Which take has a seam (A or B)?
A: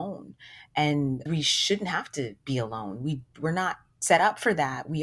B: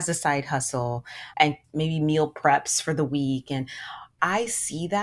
B